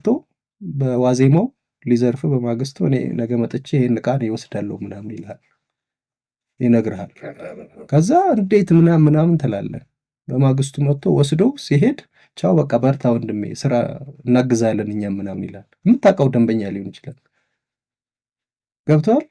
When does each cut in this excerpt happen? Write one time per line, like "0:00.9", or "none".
none